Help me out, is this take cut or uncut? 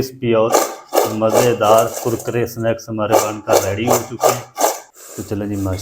cut